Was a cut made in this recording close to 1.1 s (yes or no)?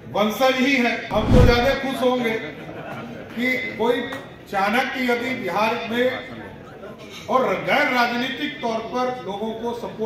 yes